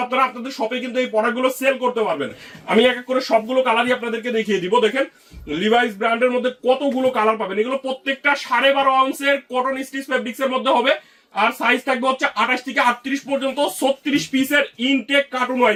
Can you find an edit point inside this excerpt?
no; 0 cuts

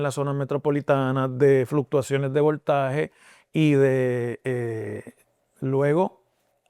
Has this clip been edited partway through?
no; 0 cuts

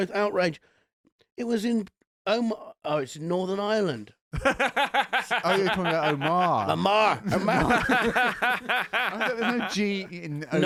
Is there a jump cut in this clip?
no; 0 cuts

